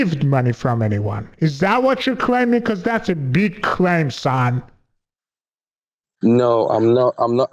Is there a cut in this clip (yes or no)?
no